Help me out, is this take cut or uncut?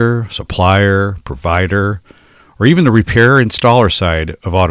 uncut